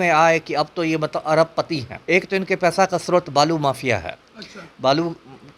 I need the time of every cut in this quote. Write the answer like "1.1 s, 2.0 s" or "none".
1.9 s